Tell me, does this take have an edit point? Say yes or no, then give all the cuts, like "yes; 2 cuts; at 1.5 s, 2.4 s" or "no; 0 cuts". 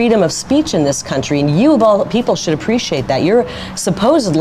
no; 0 cuts